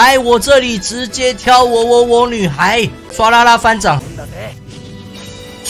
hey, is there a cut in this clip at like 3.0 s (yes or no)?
yes